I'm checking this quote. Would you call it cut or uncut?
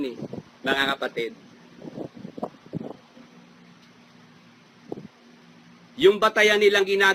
uncut